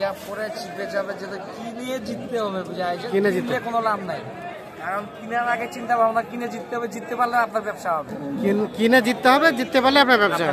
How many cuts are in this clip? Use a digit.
0